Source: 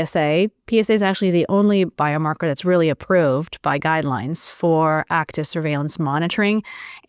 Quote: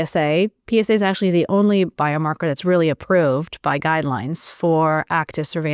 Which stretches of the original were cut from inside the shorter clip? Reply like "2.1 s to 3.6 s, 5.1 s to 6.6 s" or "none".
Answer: none